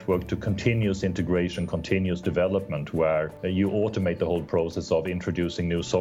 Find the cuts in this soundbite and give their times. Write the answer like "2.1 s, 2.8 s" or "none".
3.4 s